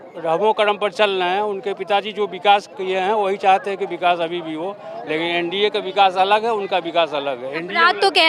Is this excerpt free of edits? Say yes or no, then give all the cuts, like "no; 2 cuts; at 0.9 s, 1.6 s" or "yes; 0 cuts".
yes; 0 cuts